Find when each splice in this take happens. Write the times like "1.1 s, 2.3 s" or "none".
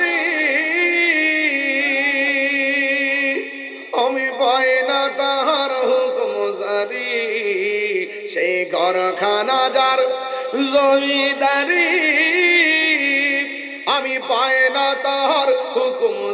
none